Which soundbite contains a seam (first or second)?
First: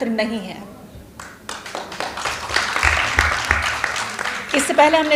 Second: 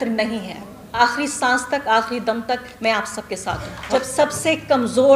second